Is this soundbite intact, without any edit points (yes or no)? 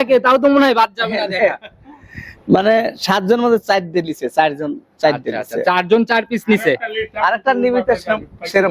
yes